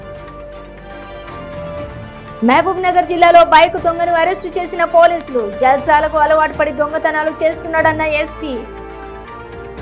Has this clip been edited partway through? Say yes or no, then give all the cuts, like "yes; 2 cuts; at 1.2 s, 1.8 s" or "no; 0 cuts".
no; 0 cuts